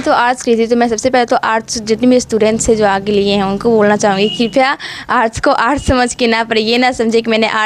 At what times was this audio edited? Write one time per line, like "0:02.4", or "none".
none